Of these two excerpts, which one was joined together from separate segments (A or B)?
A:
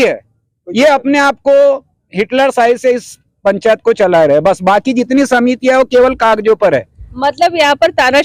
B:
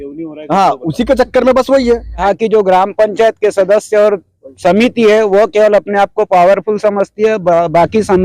B